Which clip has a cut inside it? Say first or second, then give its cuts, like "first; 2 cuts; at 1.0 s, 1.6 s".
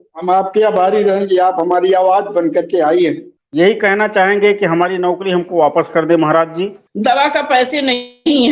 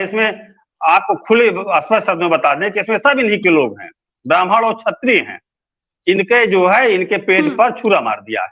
first; 2 cuts; at 3.3 s, 6.8 s